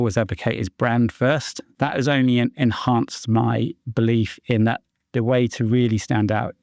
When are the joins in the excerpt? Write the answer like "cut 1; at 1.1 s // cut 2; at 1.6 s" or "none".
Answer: cut 1; at 1.6 s